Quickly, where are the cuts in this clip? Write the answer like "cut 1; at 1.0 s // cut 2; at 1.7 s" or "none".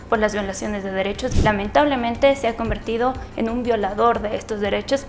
cut 1; at 1.3 s

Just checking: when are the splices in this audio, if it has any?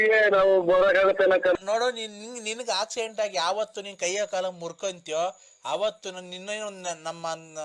cut 1; at 1.5 s

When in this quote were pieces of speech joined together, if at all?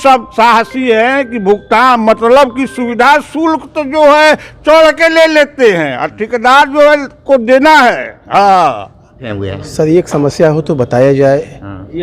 cut 1; at 9.5 s

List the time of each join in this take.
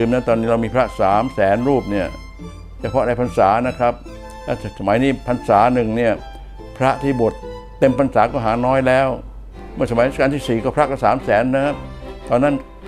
none

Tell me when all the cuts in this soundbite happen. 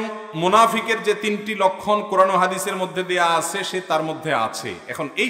none

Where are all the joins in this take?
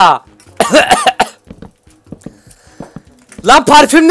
none

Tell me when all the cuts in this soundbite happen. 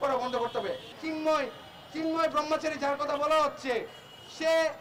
cut 1; at 0.9 s

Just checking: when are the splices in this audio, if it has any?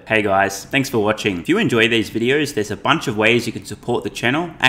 cut 1; at 0.9 s

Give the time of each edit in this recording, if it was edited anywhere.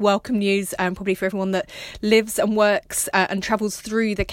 none

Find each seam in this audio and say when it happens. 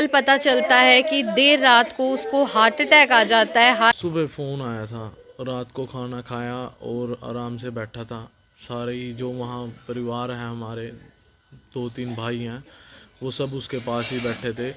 cut 1; at 3.9 s

